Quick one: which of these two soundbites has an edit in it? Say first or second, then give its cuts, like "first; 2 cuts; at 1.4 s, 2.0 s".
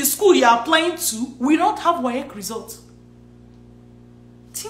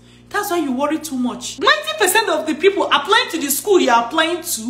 second; 1 cut; at 1.5 s